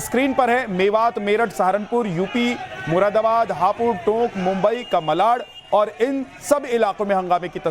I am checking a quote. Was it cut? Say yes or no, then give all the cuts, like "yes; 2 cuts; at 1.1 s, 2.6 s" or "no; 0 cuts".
yes; 1 cut; at 4.0 s